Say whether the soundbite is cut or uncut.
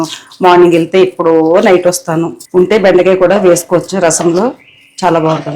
cut